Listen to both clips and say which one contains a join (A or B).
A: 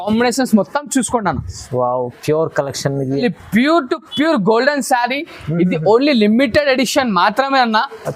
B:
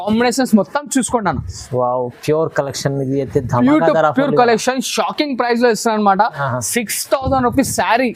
A